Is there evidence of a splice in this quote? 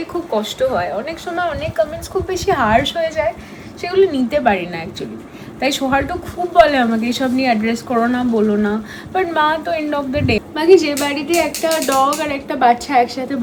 no; 0 cuts

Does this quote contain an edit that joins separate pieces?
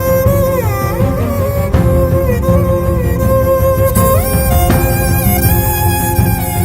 no; 0 cuts

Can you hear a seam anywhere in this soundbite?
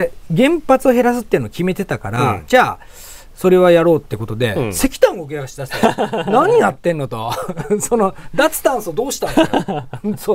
no; 0 cuts

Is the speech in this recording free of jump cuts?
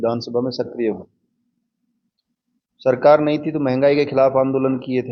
yes; 0 cuts

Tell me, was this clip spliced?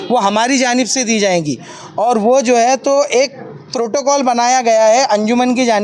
no; 0 cuts

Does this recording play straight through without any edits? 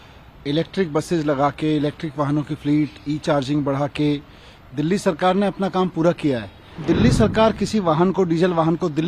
no; 1 cut; at 6.8 s

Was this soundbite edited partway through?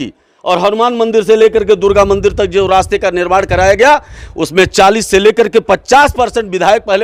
no; 0 cuts

